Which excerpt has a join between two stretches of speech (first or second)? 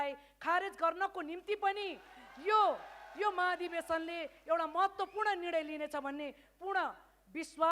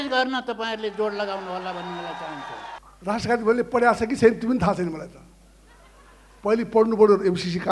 second